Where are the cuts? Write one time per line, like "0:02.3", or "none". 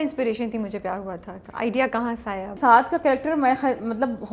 0:02.6

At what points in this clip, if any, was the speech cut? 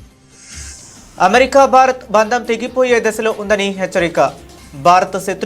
0:01.1

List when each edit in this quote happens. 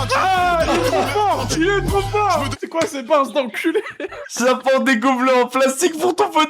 0:02.5
0:04.1

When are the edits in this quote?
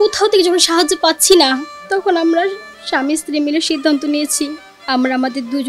none

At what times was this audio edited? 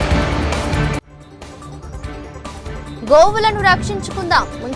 0:02.3

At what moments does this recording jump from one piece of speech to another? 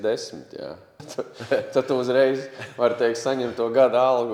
0:01.0

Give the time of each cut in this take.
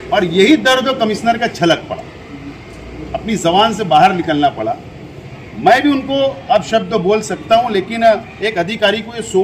none

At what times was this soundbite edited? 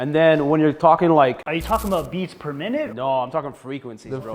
none

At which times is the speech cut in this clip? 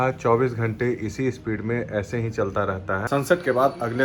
0:03.0

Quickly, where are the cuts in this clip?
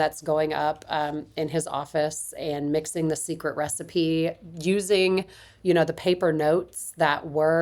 none

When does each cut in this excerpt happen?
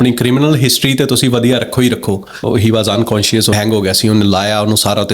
0:02.4
0:03.5

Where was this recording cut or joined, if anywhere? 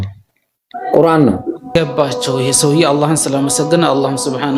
0:01.6

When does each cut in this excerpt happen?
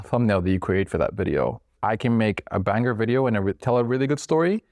0:01.7

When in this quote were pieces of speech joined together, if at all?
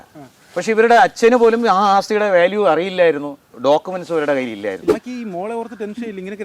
0:04.9

